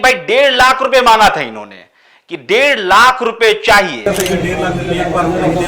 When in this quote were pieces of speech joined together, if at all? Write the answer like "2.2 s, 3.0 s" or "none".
4.0 s

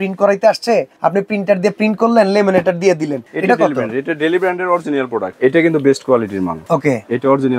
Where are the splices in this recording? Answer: 0.9 s, 3.2 s, 5.3 s, 6.6 s

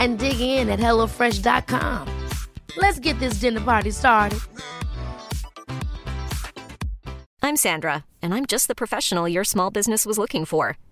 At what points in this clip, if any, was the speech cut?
7.3 s

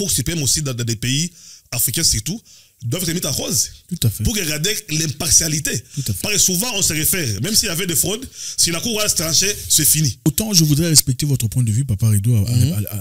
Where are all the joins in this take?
10.3 s

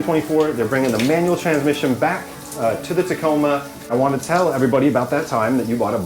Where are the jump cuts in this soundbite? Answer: 3.9 s

